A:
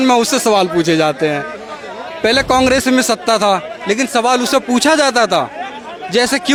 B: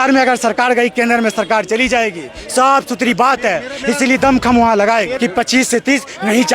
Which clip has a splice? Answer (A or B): B